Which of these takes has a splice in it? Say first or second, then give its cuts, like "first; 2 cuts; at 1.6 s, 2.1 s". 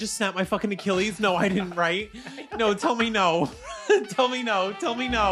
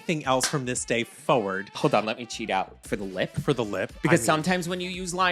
second; 2 cuts; at 1.7 s, 2.8 s